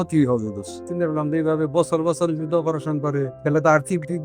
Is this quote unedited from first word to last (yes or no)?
no